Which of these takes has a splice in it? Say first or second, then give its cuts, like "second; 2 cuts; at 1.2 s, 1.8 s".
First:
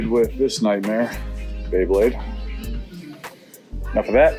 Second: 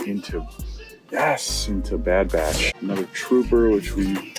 second; 1 cut; at 2.7 s